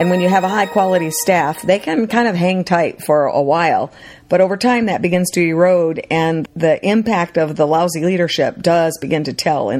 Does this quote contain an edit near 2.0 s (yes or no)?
no